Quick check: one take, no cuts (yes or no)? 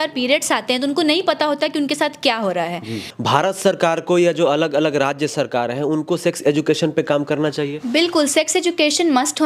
no